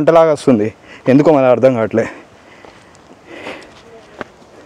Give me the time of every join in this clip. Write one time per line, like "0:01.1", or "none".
none